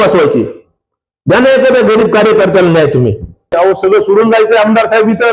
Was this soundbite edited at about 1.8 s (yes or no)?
no